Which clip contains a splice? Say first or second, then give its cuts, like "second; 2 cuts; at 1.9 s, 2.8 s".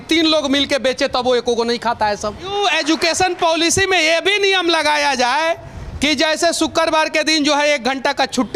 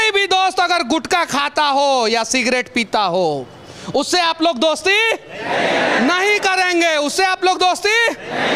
first; 1 cut; at 2.5 s